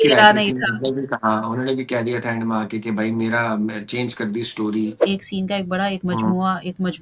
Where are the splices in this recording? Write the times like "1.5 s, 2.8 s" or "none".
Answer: 5.0 s